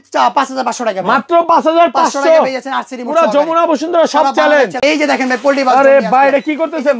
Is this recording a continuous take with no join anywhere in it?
no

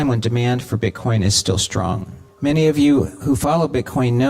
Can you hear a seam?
yes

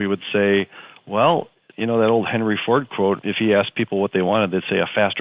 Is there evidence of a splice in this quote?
yes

